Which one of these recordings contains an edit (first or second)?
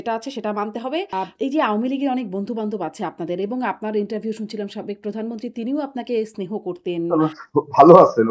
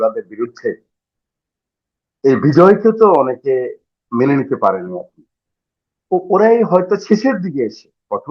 first